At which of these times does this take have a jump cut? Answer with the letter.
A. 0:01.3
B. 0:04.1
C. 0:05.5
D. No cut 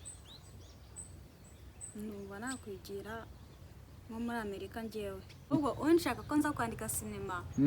C